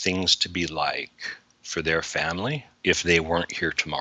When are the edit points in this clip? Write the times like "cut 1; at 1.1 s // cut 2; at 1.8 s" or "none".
cut 1; at 2.7 s